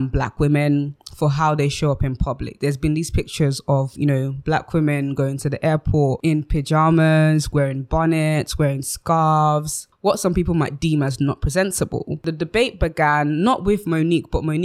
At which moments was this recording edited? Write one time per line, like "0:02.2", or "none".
none